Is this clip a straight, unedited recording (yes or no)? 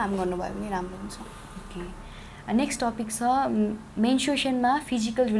yes